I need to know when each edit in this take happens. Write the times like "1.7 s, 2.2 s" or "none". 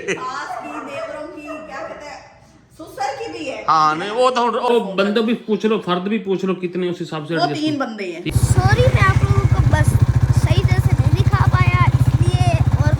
4.7 s, 8.3 s